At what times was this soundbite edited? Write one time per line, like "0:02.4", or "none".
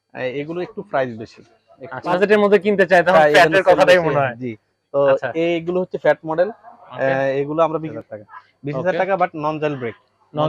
0:02.2
0:07.9